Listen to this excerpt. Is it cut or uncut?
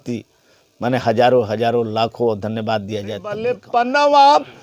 cut